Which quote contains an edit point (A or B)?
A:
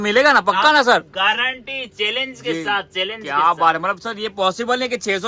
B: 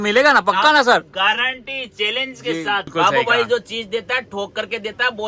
B